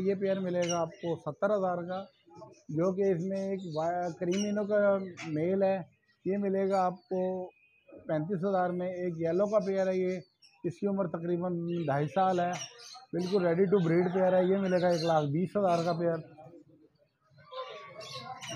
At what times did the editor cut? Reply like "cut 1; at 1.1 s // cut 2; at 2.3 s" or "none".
none